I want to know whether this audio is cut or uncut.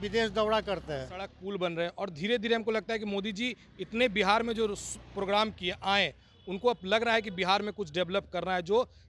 cut